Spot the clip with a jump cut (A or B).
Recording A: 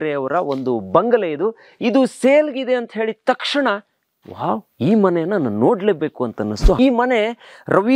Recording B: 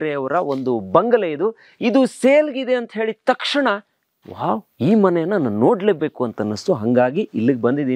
A